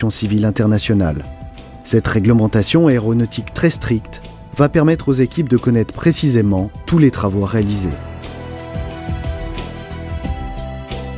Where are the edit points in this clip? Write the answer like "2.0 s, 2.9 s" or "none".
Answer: 1.8 s